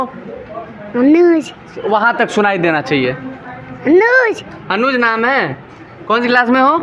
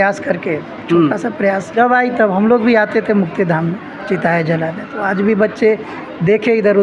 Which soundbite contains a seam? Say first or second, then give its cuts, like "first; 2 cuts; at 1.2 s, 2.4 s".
second; 1 cut; at 1.7 s